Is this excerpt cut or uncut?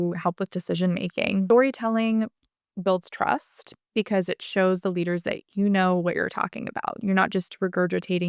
cut